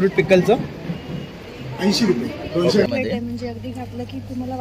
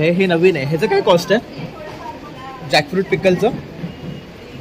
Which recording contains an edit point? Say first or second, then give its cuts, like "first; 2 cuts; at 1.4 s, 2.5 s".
first; 1 cut; at 2.9 s